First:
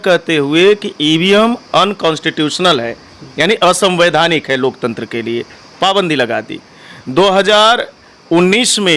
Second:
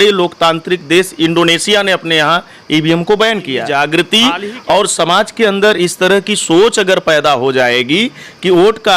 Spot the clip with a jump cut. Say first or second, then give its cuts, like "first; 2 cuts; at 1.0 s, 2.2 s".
second; 1 cut; at 3.7 s